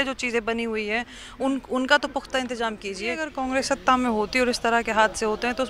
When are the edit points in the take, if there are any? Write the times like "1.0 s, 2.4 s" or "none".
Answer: 3.3 s

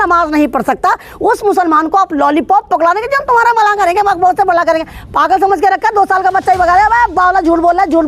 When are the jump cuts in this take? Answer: none

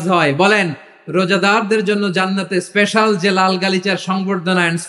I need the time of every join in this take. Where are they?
none

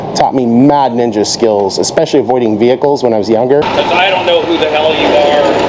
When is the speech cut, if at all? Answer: 3.7 s

